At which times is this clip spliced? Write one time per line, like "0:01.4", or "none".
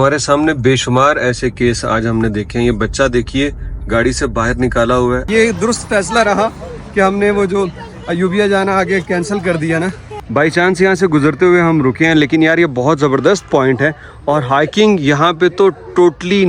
0:05.2
0:10.1